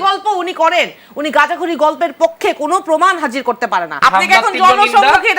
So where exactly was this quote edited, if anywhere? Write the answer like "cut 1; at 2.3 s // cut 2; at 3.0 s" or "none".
cut 1; at 3.9 s